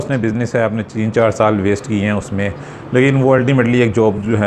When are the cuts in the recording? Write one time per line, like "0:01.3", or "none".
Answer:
none

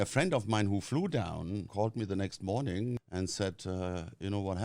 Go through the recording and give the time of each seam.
0:01.7
0:03.0

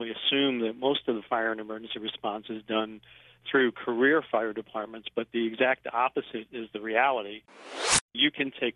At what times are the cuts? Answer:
0:06.4
0:07.8

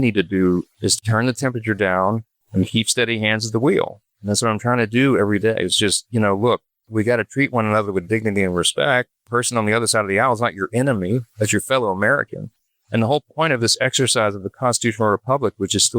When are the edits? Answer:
0:01.0

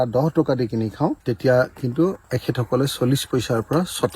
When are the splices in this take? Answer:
0:01.2

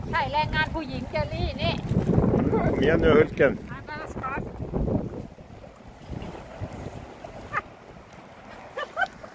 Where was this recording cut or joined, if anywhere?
0:07.5

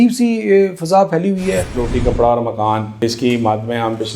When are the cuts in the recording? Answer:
0:01.7

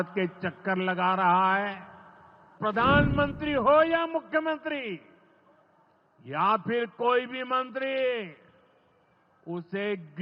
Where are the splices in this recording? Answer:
0:02.5

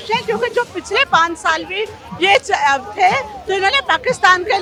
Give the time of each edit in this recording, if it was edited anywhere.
none

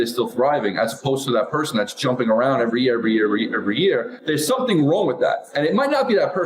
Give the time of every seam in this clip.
0:04.2

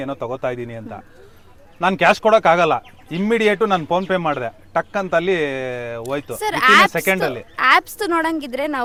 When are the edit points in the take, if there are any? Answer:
none

